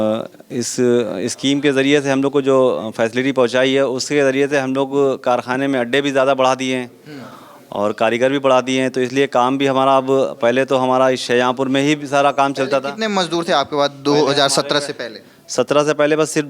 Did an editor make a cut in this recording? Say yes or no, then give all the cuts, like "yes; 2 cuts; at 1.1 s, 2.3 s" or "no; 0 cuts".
no; 0 cuts